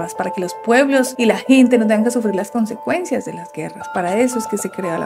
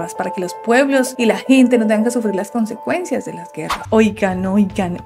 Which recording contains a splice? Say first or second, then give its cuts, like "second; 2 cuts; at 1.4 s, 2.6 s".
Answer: second; 1 cut; at 3.8 s